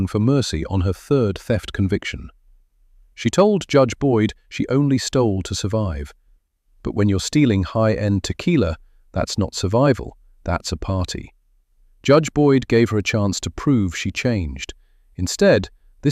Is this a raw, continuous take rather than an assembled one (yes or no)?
yes